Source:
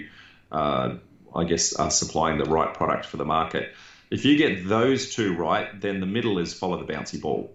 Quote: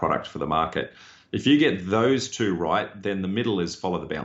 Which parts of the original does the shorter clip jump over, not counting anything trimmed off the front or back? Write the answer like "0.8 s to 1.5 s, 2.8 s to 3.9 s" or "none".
none